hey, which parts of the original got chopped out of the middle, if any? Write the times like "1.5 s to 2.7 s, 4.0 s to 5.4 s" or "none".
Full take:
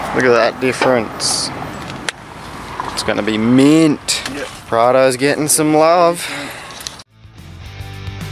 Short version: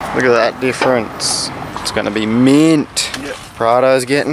1.7 s to 2.8 s

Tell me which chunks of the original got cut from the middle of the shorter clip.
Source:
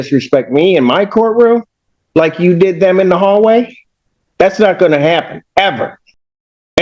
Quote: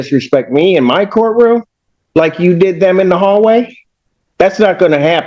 none

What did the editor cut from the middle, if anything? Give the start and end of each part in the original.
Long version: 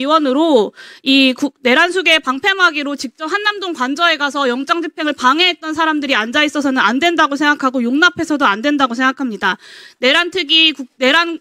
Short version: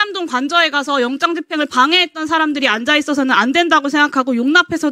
none

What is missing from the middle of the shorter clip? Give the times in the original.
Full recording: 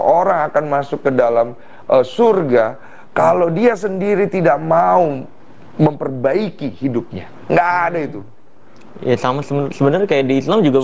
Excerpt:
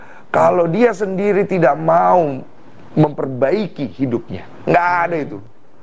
none

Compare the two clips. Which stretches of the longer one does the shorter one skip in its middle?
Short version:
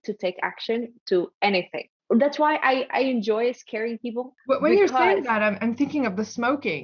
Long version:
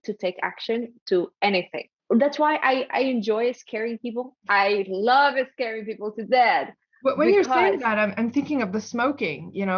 4.3 s to 6.8 s

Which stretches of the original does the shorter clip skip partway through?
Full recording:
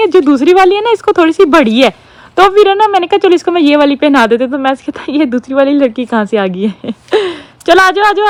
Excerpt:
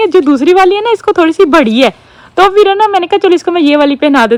none

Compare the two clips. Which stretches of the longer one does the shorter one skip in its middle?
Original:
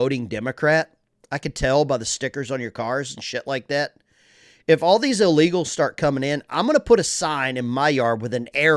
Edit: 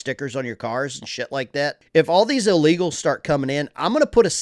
4.0 s to 4.6 s

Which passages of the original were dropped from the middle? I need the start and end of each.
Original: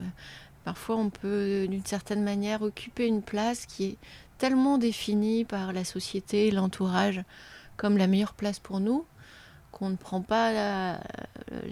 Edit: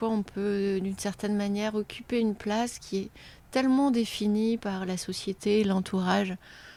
none

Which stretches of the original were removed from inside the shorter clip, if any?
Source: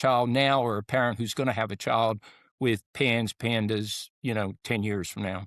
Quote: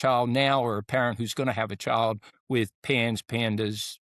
2.3 s to 2.4 s

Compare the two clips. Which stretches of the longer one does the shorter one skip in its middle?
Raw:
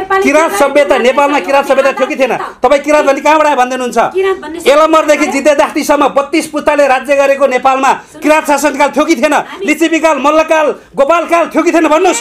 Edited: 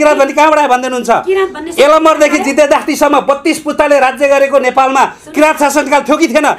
none

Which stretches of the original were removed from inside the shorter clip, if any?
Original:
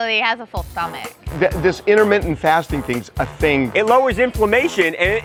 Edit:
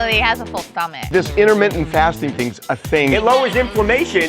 1.1 s to 1.6 s, 3.6 s to 3.8 s

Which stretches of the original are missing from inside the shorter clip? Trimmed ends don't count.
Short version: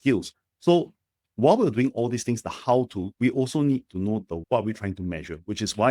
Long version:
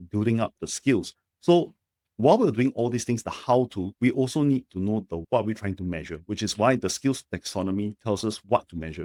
none

